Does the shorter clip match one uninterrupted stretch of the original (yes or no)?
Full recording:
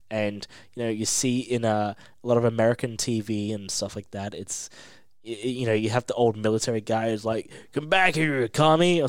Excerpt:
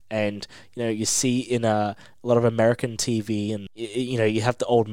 no